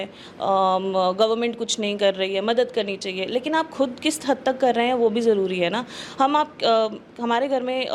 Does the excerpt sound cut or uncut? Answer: uncut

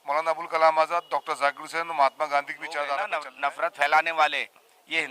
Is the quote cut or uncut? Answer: cut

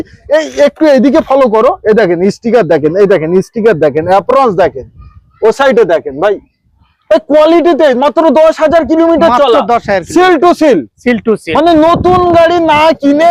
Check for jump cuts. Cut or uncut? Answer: uncut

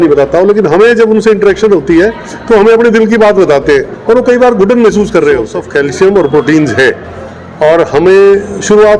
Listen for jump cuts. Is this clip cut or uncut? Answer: cut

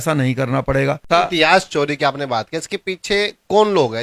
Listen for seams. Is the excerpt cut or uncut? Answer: uncut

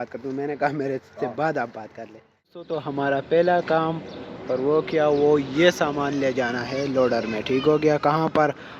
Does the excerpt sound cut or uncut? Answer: cut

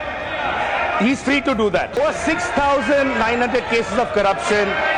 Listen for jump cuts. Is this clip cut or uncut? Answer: cut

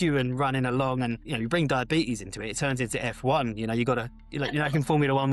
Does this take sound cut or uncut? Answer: uncut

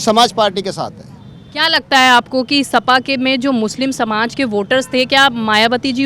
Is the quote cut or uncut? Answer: uncut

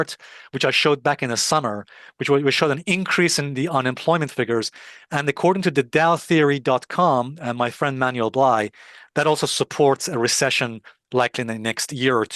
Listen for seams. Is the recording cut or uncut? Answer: uncut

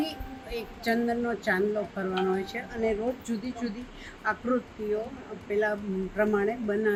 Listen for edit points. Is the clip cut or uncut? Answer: uncut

